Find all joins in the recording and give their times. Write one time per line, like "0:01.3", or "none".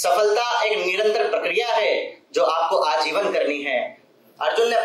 0:03.8

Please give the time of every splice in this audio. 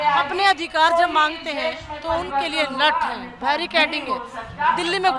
none

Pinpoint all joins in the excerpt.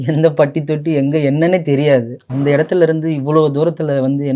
0:02.2

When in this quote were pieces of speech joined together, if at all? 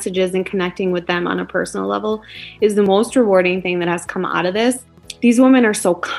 0:02.9
0:05.0

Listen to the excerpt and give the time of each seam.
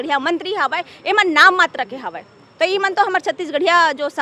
none

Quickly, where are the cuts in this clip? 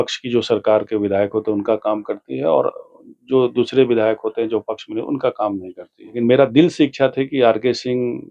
0:06.0

